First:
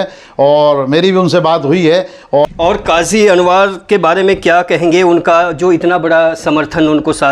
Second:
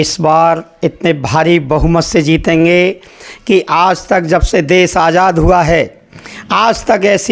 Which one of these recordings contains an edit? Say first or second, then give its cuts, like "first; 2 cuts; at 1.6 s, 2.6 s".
first; 1 cut; at 2.5 s